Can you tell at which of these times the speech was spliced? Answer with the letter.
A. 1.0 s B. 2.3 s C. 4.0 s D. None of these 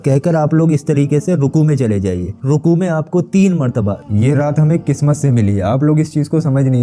C